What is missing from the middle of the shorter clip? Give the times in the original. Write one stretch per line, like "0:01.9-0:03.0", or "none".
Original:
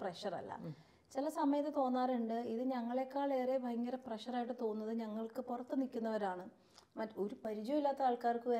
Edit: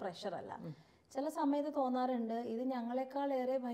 none